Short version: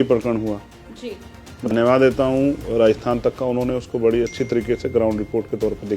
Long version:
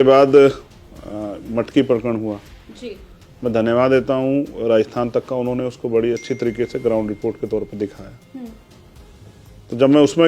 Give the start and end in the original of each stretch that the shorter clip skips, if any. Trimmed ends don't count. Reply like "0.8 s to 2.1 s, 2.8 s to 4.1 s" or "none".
3.5 s to 3.6 s

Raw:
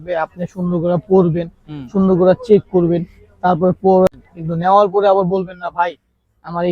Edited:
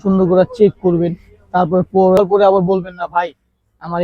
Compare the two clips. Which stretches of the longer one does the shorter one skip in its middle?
4.1 s to 4.8 s

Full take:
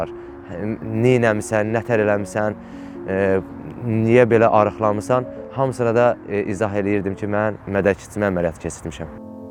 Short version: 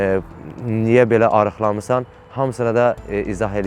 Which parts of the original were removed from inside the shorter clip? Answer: none

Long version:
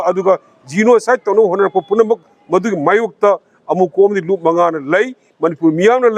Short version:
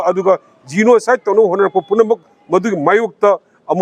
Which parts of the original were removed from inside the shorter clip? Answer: none

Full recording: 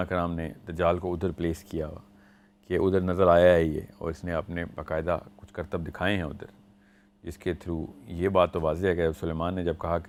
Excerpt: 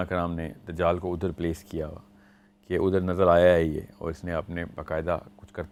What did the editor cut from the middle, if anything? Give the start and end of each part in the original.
none

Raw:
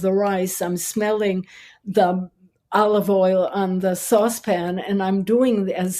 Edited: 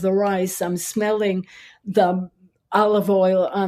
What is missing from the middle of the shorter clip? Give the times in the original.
none

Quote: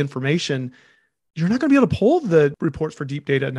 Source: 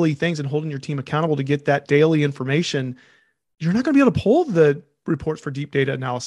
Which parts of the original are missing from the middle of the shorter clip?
4.8 s to 5.0 s

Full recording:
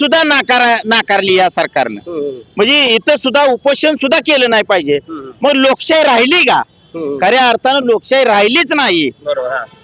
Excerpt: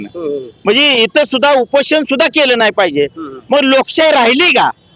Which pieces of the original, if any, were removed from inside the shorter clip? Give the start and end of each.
none

